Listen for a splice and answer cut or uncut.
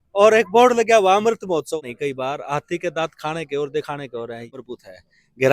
cut